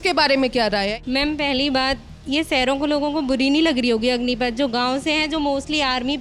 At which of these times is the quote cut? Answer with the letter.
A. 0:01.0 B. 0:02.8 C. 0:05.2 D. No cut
A